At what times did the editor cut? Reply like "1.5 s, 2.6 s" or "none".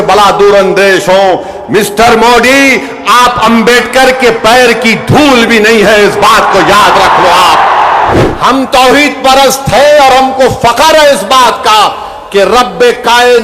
8.1 s